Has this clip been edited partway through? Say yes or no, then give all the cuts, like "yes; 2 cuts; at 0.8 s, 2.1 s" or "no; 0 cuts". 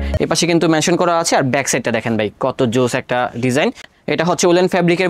yes; 1 cut; at 3.9 s